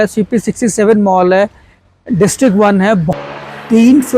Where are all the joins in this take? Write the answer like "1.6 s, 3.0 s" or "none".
3.1 s